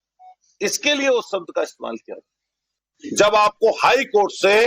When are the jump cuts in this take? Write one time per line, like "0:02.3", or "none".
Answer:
0:01.3